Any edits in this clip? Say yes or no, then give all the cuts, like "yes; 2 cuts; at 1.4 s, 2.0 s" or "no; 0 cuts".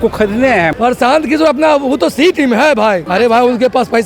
yes; 2 cuts; at 0.7 s, 3.1 s